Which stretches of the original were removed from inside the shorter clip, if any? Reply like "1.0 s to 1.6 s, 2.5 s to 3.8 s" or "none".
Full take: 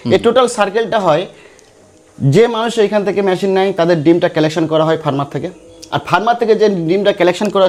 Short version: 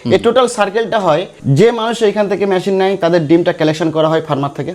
1.3 s to 2.1 s